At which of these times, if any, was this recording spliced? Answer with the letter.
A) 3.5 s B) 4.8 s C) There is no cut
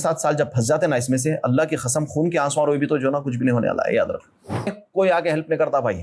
B